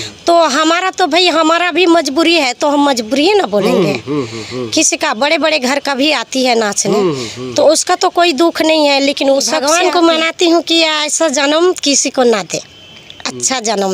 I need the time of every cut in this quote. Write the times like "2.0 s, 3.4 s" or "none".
9.6 s